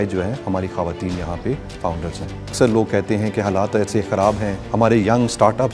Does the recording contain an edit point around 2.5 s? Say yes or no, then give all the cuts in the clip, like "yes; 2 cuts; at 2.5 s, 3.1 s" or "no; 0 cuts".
yes; 2 cuts; at 2.5 s, 4.6 s